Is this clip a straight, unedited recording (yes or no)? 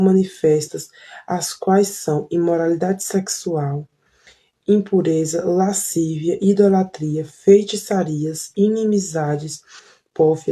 no